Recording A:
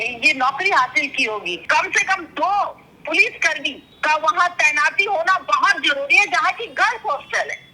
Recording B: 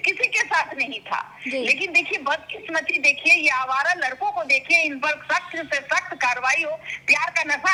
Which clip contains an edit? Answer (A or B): A